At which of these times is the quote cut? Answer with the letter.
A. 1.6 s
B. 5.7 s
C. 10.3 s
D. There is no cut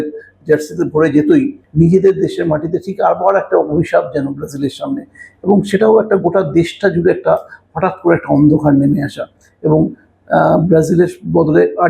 A